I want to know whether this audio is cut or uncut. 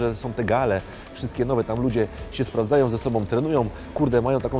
uncut